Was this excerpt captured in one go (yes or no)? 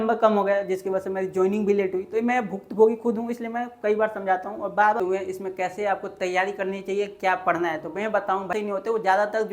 no